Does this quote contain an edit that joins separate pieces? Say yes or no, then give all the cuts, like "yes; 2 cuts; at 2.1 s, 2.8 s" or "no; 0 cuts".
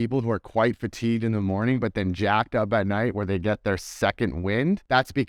no; 0 cuts